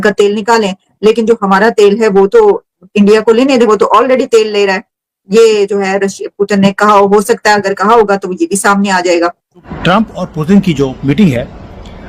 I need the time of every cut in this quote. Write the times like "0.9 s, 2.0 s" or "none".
9.7 s